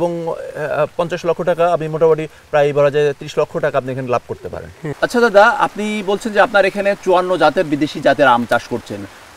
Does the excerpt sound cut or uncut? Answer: cut